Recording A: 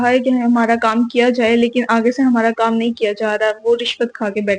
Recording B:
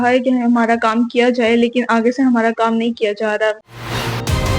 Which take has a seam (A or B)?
B